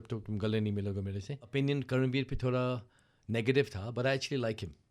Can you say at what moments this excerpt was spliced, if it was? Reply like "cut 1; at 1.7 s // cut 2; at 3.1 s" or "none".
cut 1; at 1.4 s